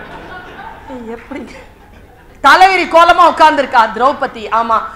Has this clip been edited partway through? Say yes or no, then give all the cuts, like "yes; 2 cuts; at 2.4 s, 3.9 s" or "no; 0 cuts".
yes; 1 cut; at 2.2 s